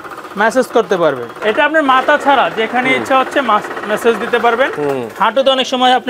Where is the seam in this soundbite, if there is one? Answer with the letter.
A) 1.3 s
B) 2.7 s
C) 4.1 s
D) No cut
A